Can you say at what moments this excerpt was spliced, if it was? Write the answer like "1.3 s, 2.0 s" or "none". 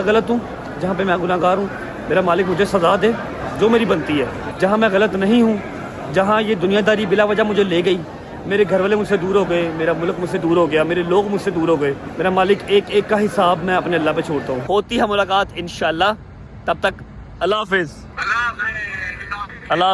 4.4 s, 12.1 s, 14.6 s, 18.1 s

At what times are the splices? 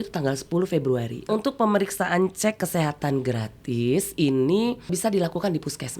1.3 s, 5.0 s

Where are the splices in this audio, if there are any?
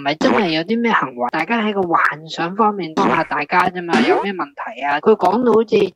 1.3 s, 5.0 s

